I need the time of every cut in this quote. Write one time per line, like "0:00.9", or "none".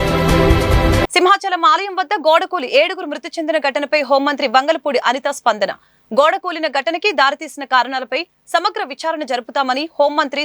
0:01.1